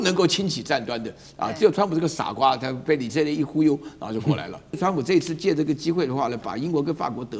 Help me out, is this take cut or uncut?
cut